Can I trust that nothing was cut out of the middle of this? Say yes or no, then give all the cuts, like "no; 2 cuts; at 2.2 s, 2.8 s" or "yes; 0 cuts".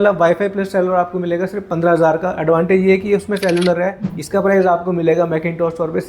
no; 1 cut; at 4.0 s